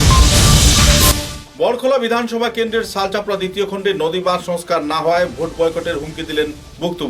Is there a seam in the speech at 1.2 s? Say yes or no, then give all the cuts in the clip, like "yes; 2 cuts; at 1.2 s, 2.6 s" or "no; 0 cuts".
yes; 1 cut; at 1.2 s